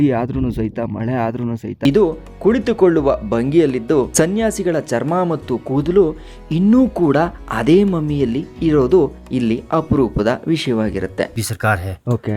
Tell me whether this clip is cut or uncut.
cut